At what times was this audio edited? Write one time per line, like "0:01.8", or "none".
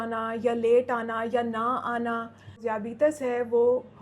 0:02.6